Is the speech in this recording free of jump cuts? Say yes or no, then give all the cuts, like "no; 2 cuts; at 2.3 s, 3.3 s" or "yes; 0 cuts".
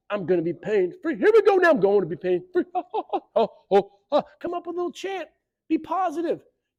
yes; 0 cuts